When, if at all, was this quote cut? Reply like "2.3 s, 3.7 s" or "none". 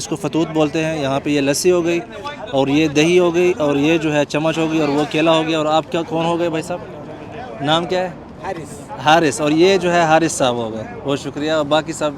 none